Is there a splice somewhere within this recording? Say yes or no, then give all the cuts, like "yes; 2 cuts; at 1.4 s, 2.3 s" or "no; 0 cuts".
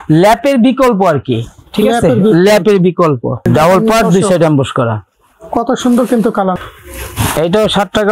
yes; 2 cuts; at 3.4 s, 6.5 s